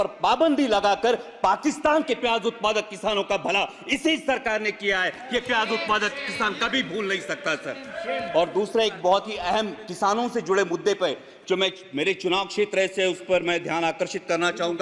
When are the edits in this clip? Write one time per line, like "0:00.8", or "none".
none